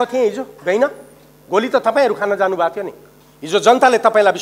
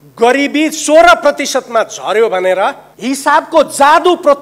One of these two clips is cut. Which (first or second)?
second